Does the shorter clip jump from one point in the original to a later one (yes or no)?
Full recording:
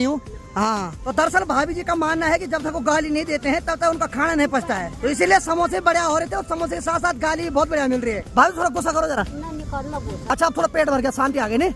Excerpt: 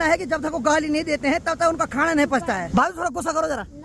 yes